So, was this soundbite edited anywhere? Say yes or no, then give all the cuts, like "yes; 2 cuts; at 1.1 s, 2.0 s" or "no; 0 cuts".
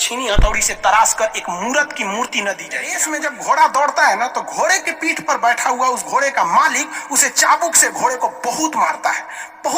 yes; 1 cut; at 3.0 s